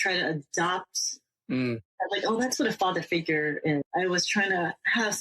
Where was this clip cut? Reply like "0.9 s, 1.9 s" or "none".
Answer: 3.9 s